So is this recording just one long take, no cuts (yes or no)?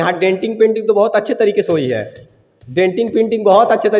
yes